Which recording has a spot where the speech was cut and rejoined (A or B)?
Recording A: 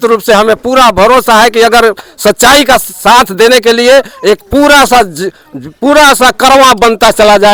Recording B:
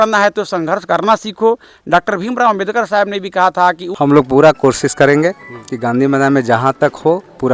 B